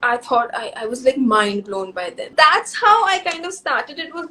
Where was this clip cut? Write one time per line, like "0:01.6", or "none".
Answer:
0:02.2